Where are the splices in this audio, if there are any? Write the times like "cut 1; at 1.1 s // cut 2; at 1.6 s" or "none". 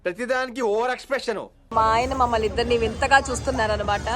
cut 1; at 1.7 s